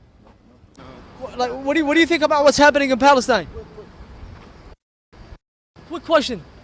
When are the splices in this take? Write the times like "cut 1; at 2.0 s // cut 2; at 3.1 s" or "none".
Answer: none